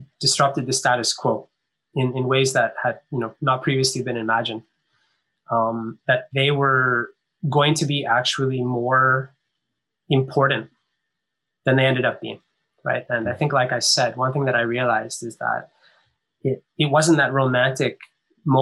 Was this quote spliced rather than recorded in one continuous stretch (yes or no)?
no